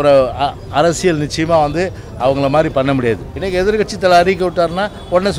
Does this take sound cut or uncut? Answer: cut